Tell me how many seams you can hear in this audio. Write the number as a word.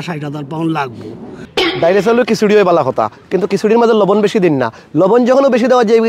one